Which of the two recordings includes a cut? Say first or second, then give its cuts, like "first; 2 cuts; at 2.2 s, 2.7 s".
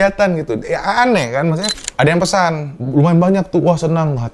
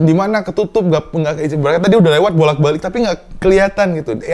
first; 1 cut; at 1.7 s